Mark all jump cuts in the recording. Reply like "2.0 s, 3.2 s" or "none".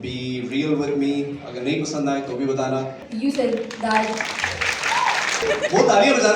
3.0 s, 5.4 s